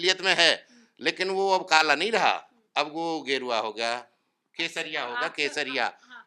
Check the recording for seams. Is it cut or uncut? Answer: uncut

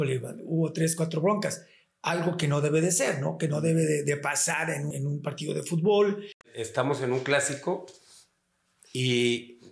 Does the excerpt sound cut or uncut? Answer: cut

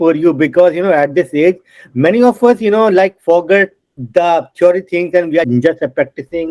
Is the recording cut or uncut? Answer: cut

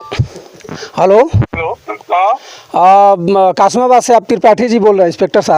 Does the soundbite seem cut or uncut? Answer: uncut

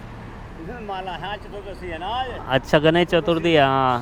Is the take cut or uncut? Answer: uncut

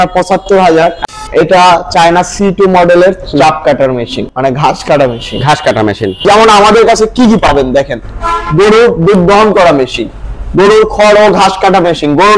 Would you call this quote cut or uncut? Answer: cut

